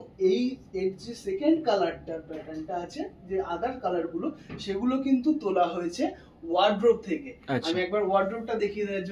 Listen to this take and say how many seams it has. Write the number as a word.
zero